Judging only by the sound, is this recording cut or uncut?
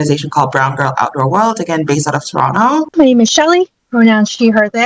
cut